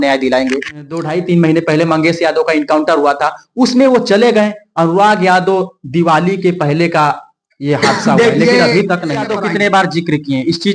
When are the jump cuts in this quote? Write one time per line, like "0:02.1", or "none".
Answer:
0:01.0
0:09.4